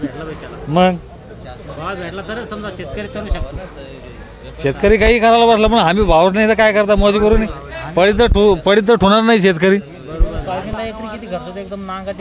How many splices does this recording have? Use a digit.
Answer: 1